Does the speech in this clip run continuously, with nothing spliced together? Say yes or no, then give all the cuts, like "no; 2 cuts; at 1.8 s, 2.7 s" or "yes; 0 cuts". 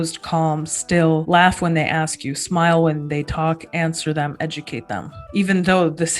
no; 2 cuts; at 1.2 s, 5.3 s